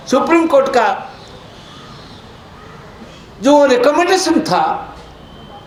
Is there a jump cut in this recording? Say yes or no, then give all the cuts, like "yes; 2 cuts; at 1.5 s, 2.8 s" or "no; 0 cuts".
no; 0 cuts